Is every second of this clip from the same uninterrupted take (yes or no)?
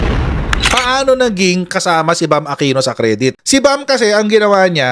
no